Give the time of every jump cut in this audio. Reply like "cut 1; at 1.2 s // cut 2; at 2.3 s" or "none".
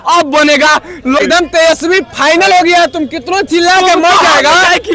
cut 1; at 1.2 s